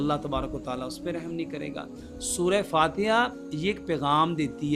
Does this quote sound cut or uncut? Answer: uncut